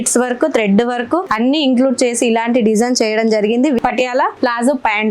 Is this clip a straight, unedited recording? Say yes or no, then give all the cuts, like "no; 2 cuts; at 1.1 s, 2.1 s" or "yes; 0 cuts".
no; 1 cut; at 3.8 s